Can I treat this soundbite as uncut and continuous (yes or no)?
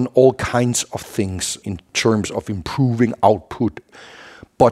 no